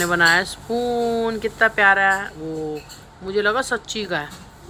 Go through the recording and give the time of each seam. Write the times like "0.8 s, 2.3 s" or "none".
none